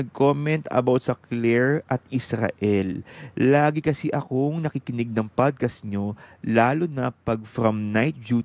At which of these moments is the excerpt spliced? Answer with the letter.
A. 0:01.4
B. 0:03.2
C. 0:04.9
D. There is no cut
D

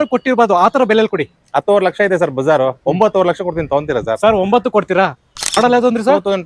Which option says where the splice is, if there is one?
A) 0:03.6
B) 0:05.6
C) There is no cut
B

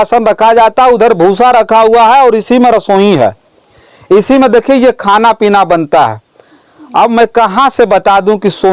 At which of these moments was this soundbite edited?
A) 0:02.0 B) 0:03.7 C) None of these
C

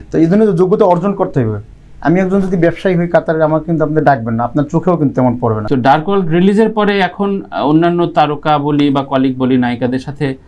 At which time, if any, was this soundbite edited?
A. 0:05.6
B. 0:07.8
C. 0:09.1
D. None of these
A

